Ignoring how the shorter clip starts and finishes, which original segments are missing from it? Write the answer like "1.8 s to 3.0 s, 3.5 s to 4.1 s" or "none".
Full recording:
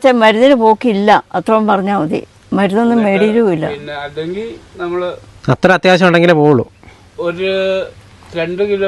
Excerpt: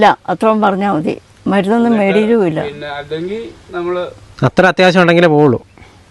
none